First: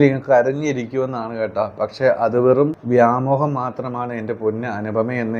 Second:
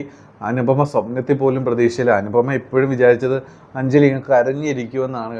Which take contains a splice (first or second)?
first